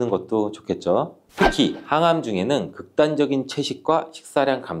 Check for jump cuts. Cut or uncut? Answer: cut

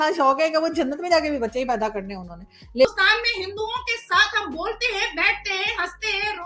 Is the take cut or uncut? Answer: cut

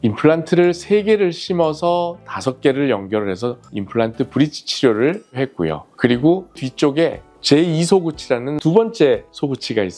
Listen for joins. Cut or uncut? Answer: uncut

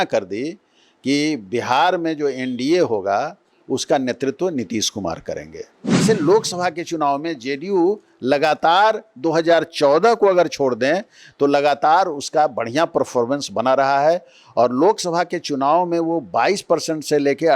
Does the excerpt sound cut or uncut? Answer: cut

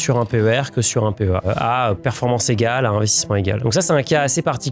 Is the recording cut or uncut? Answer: cut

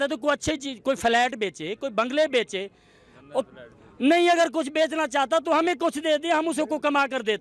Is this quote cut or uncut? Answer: uncut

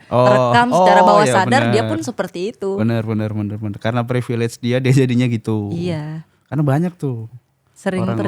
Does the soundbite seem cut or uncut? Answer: uncut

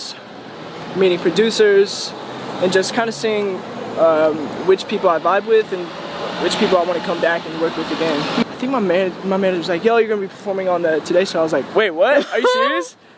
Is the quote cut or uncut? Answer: cut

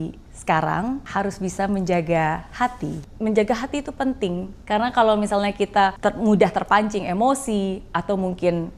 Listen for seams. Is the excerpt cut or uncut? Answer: cut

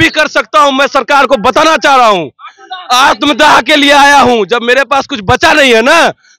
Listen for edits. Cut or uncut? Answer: uncut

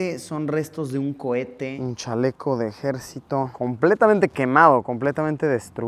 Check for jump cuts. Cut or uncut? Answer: cut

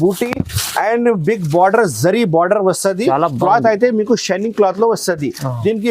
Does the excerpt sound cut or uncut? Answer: uncut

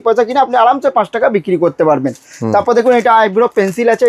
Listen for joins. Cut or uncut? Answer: uncut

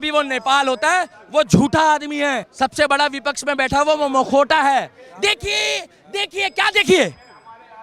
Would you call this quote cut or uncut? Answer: cut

